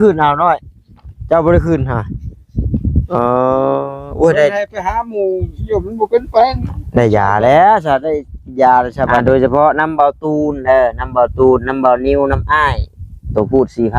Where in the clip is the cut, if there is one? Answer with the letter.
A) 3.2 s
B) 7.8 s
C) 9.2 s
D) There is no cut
C